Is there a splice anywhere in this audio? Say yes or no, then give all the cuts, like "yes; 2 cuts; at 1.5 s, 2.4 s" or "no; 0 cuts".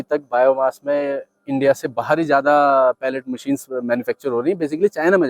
no; 0 cuts